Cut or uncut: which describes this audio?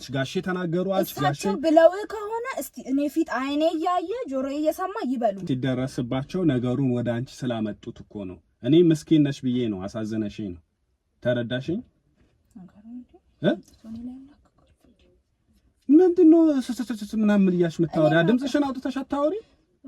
cut